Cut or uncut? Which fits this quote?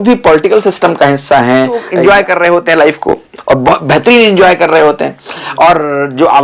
cut